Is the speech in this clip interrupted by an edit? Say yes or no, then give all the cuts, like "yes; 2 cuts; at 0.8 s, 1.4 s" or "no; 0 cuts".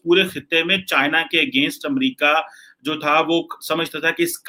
no; 0 cuts